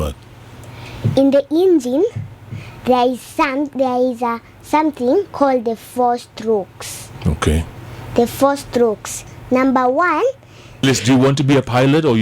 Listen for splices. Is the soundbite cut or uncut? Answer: cut